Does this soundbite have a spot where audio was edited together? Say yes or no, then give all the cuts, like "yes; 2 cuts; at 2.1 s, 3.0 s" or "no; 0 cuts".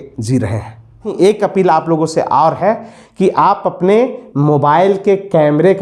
yes; 1 cut; at 1.1 s